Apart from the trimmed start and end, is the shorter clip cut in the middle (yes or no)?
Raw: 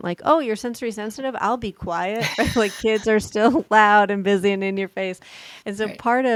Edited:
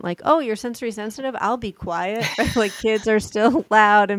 no